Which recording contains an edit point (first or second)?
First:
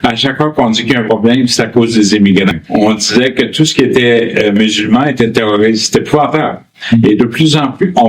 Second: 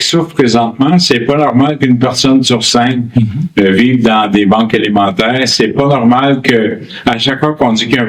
first